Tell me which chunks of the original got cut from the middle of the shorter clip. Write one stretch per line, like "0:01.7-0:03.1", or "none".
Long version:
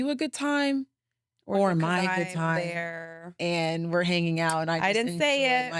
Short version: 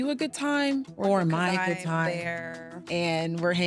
0:00.9-0:01.4